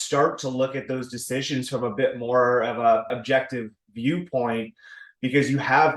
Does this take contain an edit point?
yes; 1 cut; at 3.2 s

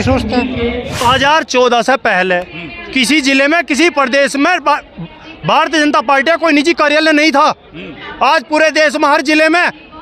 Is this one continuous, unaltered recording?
no; 1 cut; at 1.0 s

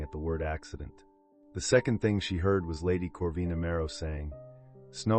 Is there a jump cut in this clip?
yes; 1 cut; at 4.2 s

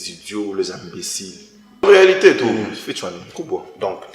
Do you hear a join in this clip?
yes; 1 cut; at 1.8 s

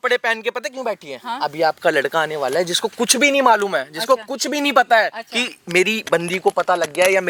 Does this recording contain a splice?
no; 0 cuts

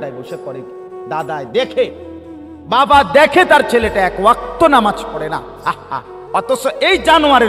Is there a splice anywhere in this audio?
no; 0 cuts

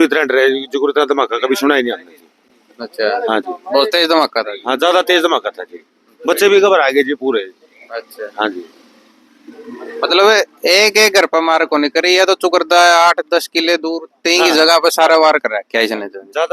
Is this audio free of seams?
yes; 0 cuts

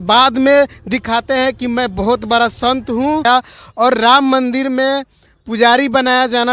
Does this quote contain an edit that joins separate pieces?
yes; 1 cut; at 3.2 s

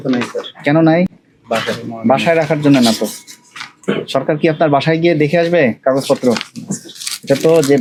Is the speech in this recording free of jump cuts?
yes; 0 cuts

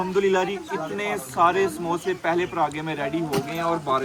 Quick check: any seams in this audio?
no; 0 cuts

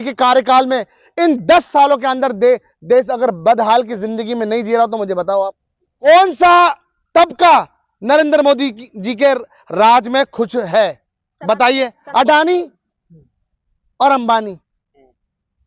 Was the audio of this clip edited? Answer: yes; 1 cut; at 6.1 s

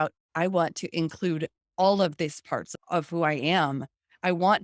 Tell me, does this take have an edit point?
yes; 1 cut; at 2.7 s

